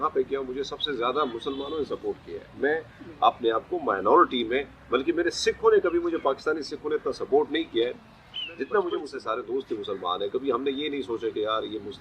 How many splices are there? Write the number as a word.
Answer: one